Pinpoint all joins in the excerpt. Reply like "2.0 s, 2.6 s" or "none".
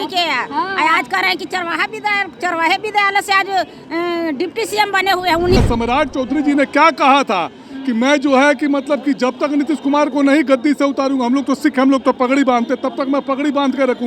5.6 s